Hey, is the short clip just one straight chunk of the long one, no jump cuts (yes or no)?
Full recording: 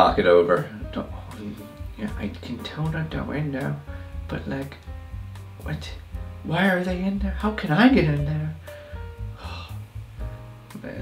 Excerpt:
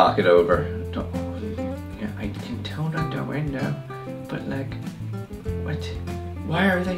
yes